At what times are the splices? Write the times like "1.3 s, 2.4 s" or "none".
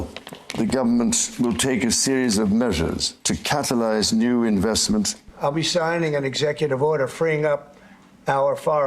3.1 s, 5.2 s